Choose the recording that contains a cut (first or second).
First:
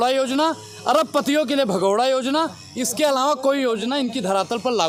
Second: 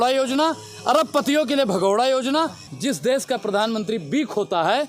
second